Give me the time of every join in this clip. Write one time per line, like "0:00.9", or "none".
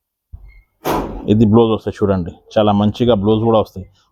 none